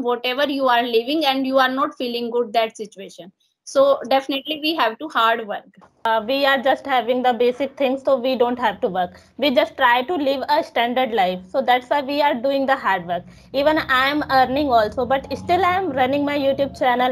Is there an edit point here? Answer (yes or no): yes